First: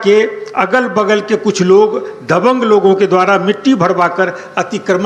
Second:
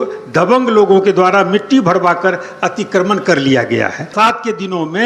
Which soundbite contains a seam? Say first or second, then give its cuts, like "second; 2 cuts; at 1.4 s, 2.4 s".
second; 1 cut; at 4.1 s